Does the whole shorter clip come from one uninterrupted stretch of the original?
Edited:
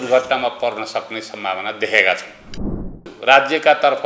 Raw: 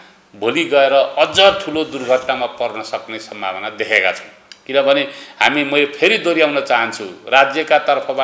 no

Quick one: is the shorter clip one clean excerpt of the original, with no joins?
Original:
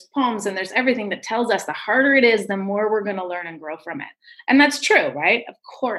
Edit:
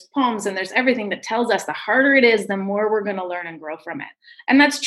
yes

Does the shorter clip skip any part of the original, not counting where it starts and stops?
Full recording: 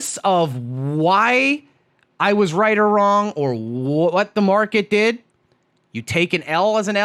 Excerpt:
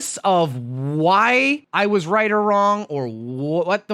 yes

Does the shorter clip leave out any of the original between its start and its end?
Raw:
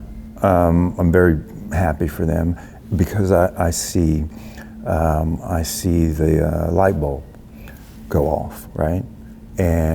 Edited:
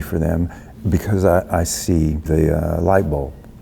yes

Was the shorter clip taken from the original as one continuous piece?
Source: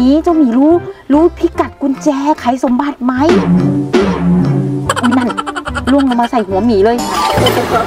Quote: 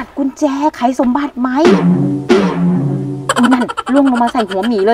no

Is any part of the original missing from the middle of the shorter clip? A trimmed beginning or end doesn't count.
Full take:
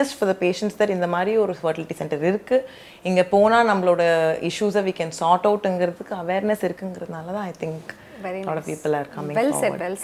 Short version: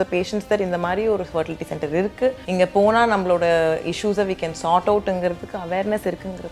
yes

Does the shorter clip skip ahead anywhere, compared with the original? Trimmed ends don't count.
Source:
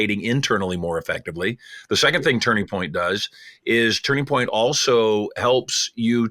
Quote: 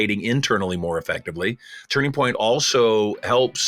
yes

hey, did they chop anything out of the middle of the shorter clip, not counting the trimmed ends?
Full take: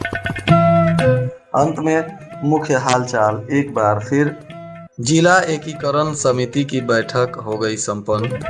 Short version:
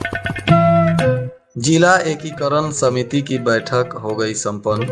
yes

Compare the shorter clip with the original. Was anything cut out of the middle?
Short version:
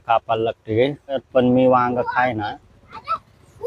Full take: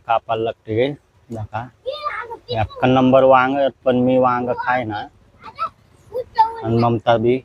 yes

